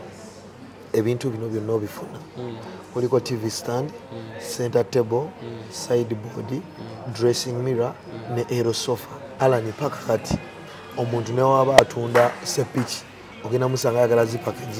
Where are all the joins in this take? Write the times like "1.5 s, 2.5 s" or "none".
9.3 s